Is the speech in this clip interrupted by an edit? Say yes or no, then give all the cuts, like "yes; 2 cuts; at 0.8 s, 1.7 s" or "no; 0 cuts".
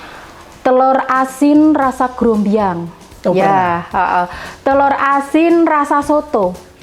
no; 0 cuts